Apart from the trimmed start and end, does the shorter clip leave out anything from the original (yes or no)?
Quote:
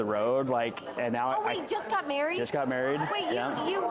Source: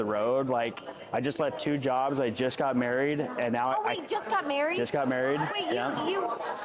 yes